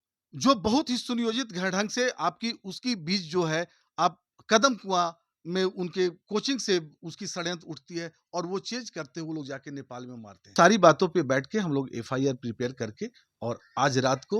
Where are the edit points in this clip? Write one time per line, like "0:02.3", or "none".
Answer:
0:10.5